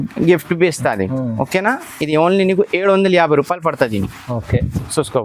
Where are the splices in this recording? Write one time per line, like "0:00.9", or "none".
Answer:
none